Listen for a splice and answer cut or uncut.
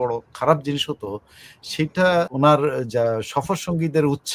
cut